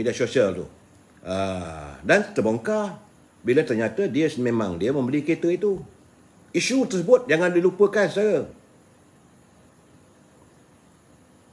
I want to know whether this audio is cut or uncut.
uncut